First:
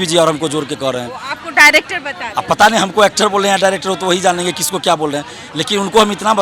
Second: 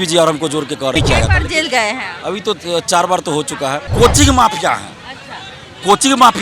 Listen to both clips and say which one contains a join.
second; 2 cuts; at 0.9 s, 3.9 s

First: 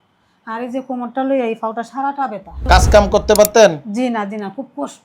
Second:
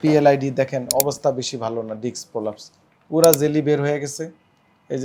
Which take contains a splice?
first; 1 cut; at 2.6 s

